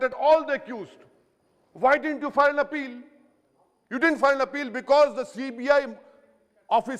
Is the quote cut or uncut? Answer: uncut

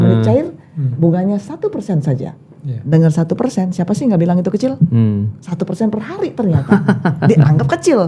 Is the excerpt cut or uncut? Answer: uncut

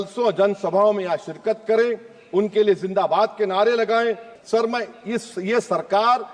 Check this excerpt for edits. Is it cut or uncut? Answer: cut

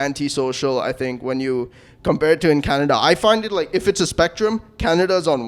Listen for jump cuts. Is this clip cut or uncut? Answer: uncut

